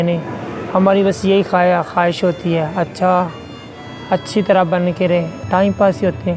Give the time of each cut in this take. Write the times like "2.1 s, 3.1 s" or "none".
5.4 s